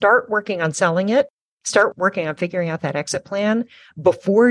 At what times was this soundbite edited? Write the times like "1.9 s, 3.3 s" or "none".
none